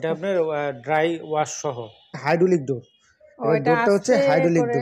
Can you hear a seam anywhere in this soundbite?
yes; 1 cut; at 2.1 s

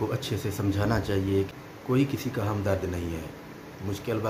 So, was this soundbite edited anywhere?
yes; 1 cut; at 1.5 s

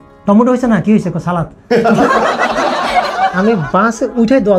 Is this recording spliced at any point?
yes; 1 cut; at 3.2 s

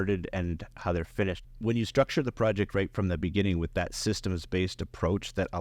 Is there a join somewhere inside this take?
yes; 1 cut; at 1.4 s

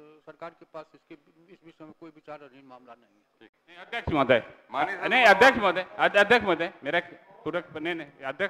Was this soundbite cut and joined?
no; 0 cuts

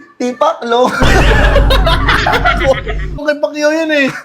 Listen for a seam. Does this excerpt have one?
yes; 1 cut; at 3.2 s

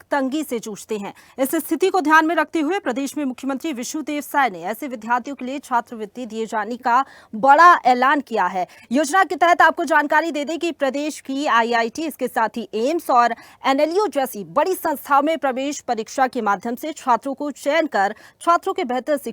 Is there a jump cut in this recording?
no; 0 cuts

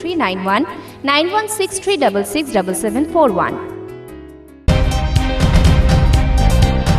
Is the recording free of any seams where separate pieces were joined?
no; 1 cut; at 4.6 s

